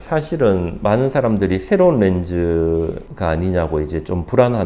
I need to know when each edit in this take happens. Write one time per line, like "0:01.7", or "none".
none